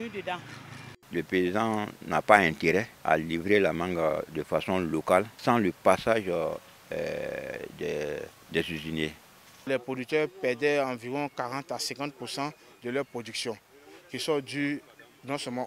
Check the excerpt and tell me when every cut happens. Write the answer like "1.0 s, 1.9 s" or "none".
0.9 s, 2.9 s, 5.3 s, 8.4 s, 9.5 s